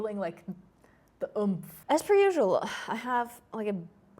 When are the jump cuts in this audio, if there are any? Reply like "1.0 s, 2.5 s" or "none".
1.7 s